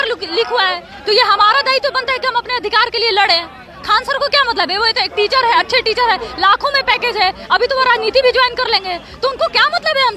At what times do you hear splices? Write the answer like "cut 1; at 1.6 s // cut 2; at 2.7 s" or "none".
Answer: none